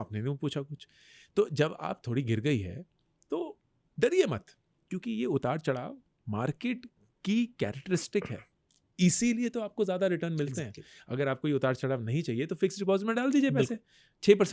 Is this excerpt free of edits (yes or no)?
yes